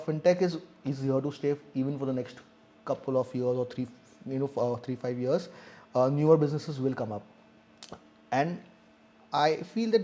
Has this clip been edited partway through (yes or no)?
no